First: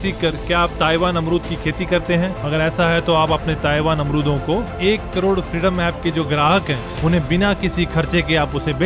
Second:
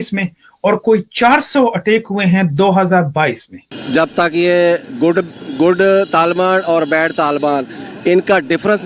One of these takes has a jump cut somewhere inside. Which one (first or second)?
second